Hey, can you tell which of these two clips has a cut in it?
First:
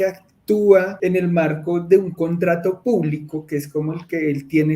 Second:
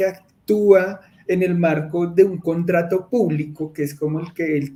first; 1 cut; at 0.9 s

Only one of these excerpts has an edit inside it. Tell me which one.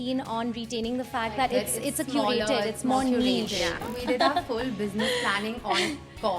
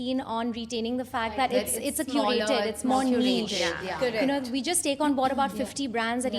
first; 1 cut; at 3.9 s

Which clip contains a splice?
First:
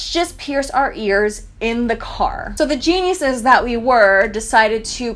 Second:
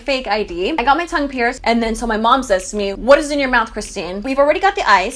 second; 3 cuts; at 1.6 s, 3.0 s, 4.3 s

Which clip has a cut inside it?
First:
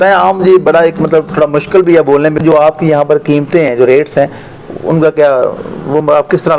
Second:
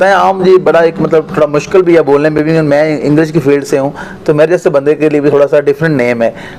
first; 1 cut; at 2.4 s

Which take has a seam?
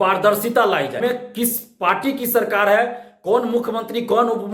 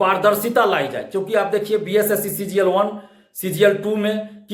first; 1 cut; at 1.0 s

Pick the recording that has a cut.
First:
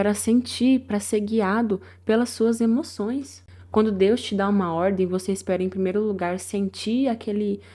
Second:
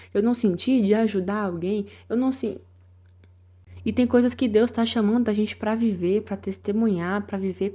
first; 1 cut; at 3.3 s

